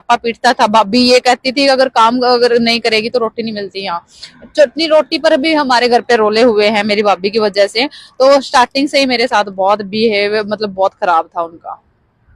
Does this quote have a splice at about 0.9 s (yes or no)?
no